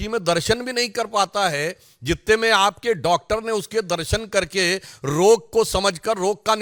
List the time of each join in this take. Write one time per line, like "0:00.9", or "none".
none